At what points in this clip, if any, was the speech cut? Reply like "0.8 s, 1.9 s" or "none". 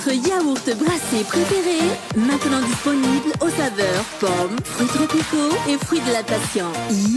none